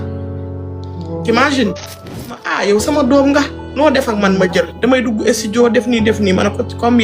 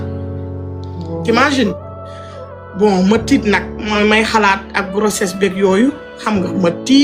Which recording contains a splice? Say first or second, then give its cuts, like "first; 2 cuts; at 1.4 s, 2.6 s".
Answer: first; 1 cut; at 2.5 s